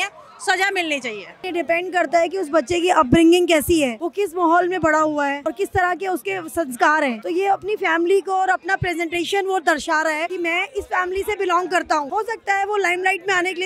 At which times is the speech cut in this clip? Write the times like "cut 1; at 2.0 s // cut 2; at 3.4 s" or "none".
cut 1; at 1.4 s // cut 2; at 4.0 s // cut 3; at 5.4 s // cut 4; at 7.2 s // cut 5; at 10.3 s // cut 6; at 12.1 s